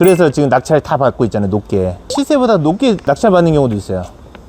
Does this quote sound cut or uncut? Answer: cut